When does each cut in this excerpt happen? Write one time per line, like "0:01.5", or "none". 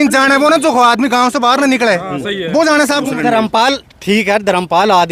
0:03.1